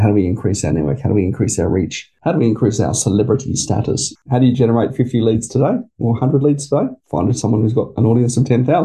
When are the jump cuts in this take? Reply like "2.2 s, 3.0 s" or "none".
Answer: 2.0 s, 4.2 s, 7.0 s